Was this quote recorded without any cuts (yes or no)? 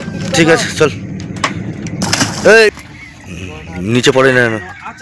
no